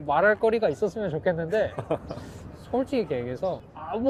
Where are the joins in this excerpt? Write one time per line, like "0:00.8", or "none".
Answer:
none